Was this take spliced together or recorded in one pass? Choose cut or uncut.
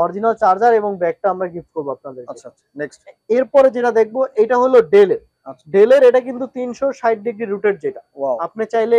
uncut